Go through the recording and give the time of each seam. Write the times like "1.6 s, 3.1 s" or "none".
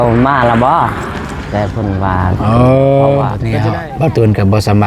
3.5 s